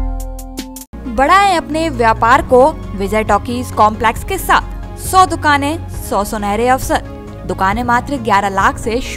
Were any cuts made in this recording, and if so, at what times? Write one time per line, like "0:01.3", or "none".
none